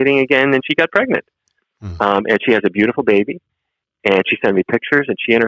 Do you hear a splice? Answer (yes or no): no